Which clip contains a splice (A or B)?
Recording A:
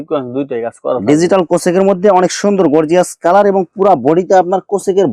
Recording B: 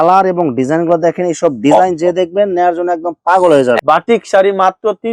B